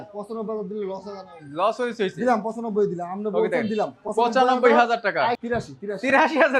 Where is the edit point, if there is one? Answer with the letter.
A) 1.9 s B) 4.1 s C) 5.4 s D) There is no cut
C